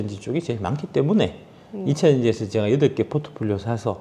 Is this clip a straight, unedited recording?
yes; 0 cuts

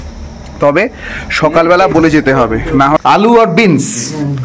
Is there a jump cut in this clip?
yes; 1 cut; at 3.1 s

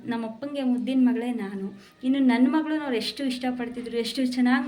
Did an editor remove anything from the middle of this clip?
no; 0 cuts

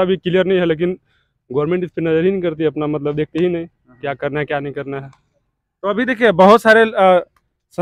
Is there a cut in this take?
no; 0 cuts

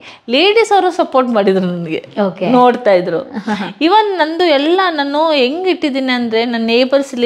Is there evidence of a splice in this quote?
no; 0 cuts

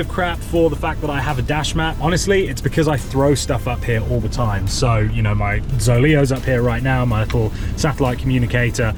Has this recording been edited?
no; 0 cuts

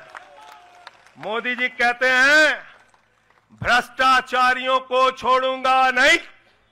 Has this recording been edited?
no; 0 cuts

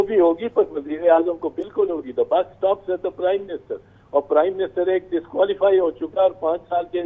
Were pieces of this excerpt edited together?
no; 0 cuts

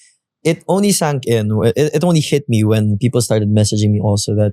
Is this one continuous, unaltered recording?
yes; 0 cuts

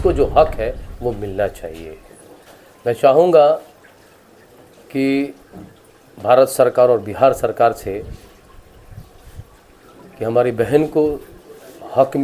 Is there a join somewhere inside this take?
no; 0 cuts

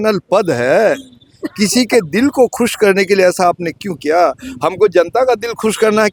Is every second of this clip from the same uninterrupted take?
yes; 0 cuts

